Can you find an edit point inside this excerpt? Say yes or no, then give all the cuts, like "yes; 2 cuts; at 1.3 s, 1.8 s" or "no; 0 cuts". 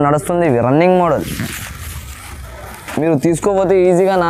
no; 0 cuts